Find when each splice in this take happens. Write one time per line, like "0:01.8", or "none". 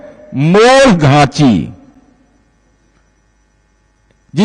none

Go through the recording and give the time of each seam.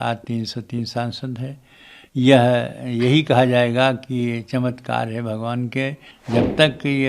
0:06.1

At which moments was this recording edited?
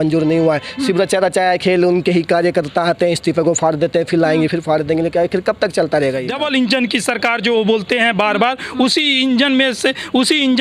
0:06.3

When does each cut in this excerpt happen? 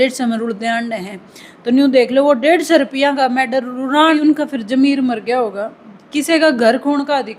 0:04.2

